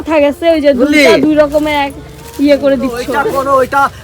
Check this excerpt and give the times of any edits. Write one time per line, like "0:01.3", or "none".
0:03.1